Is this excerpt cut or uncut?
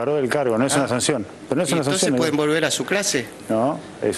uncut